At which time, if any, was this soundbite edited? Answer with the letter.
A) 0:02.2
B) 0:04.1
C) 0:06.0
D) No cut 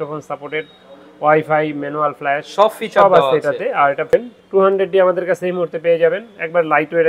B